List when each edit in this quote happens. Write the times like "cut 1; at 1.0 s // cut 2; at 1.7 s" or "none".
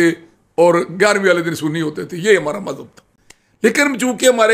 none